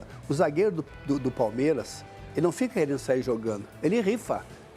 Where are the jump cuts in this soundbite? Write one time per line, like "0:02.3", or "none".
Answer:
none

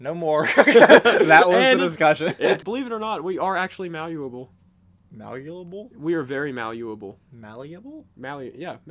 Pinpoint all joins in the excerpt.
0:02.6

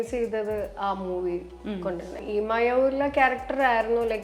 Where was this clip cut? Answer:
0:02.2

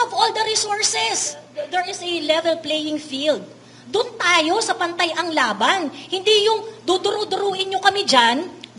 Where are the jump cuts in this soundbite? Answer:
0:01.5

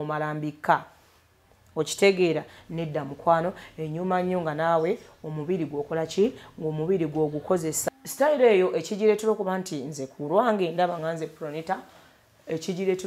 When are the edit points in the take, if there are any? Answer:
0:07.8

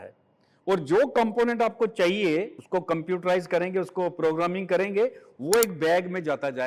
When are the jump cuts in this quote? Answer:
0:02.6

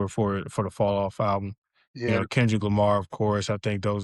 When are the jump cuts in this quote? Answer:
0:02.1

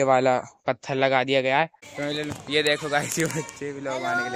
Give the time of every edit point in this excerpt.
0:01.9

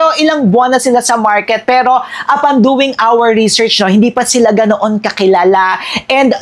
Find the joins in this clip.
none

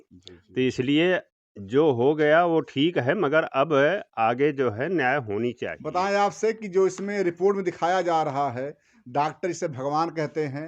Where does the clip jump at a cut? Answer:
0:05.7

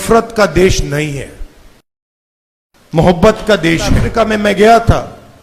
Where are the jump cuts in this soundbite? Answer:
0:04.0

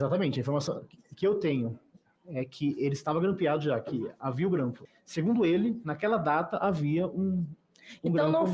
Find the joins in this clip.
0:04.8

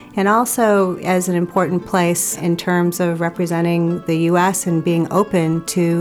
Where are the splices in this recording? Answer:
0:02.4

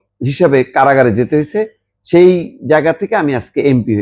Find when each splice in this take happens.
none

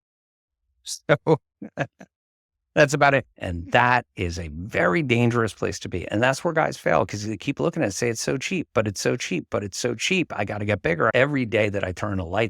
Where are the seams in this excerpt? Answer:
0:03.3
0:11.1

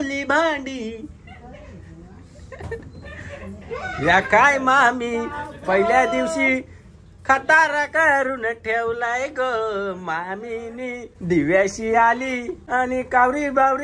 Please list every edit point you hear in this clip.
0:11.1
0:12.5

